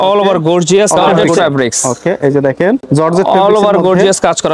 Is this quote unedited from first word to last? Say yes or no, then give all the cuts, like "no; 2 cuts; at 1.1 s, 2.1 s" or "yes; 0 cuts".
no; 2 cuts; at 1.2 s, 2.8 s